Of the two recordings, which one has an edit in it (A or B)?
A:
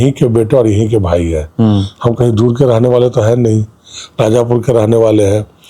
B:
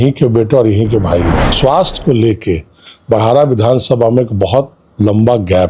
B